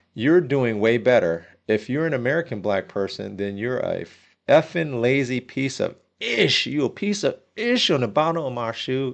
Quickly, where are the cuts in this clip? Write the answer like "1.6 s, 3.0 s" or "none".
none